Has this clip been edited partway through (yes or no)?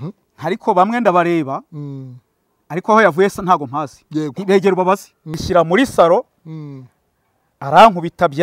yes